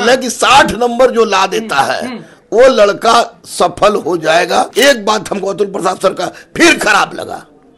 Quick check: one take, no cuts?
no; 1 cut; at 4.7 s

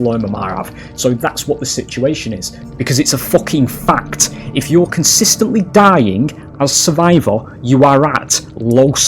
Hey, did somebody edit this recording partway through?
yes; 1 cut; at 2.6 s

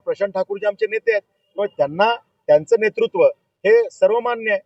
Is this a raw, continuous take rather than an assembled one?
yes; 0 cuts

